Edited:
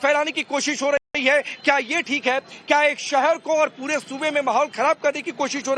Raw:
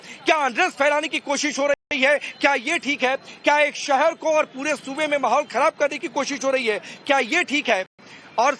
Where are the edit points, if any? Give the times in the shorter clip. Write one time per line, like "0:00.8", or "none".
none